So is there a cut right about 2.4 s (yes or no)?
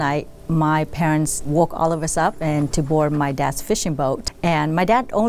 yes